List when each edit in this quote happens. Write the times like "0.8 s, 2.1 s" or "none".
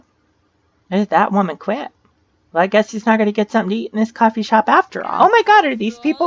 5.0 s

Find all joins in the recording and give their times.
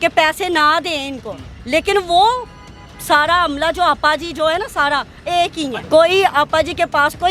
5.8 s

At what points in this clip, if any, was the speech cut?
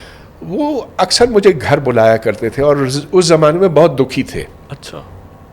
none

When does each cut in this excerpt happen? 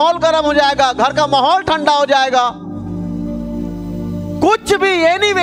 none

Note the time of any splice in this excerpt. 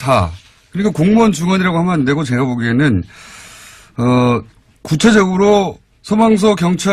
none

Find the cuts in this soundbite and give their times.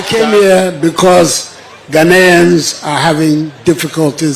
none

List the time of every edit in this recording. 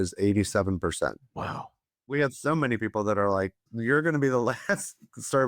2.1 s, 3.7 s

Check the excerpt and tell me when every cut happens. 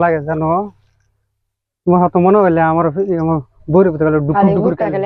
none

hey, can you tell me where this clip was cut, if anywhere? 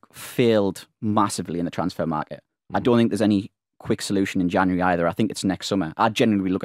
none

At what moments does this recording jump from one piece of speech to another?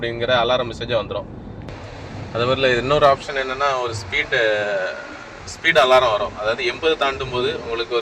1.7 s

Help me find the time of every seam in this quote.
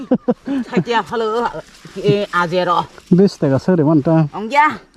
none

